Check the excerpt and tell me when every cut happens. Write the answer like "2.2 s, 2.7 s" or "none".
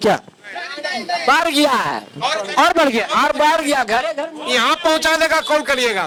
none